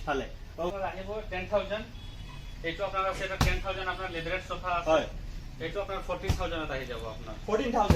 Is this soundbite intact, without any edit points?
yes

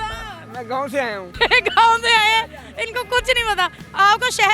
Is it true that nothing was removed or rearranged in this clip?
yes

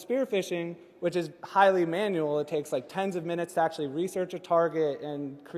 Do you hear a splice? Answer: no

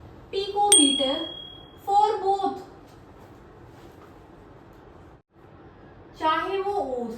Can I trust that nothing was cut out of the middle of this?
no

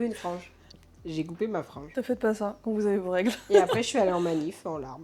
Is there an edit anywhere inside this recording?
no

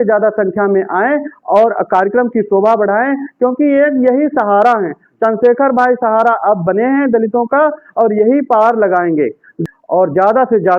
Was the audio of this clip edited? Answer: yes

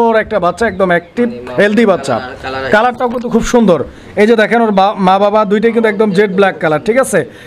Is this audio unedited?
yes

